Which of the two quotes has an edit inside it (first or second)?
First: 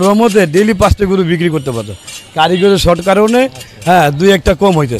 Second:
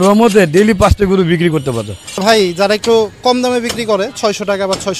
second